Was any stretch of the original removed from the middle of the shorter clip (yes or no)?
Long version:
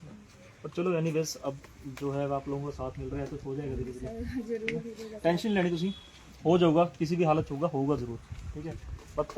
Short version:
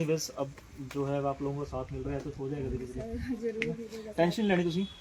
no